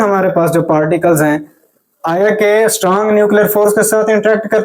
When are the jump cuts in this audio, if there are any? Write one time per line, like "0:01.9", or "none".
none